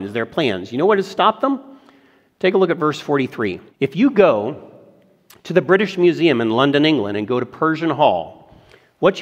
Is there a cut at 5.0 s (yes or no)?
no